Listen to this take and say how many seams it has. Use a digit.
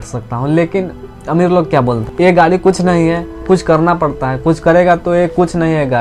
2